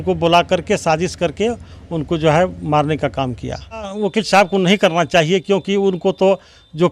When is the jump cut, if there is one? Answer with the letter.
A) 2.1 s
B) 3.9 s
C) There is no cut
B